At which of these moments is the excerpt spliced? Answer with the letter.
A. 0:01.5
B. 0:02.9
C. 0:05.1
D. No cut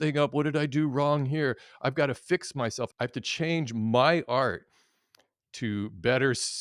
B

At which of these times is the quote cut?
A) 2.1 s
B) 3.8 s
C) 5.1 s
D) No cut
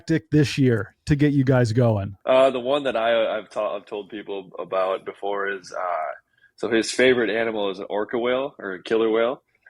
A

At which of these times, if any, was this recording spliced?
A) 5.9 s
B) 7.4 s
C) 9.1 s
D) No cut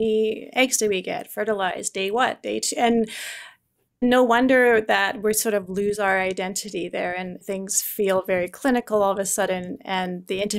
B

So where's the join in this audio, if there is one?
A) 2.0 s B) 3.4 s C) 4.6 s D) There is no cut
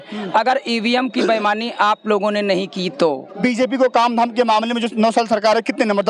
B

